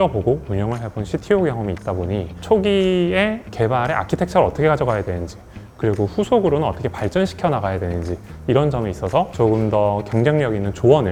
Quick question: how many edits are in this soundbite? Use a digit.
0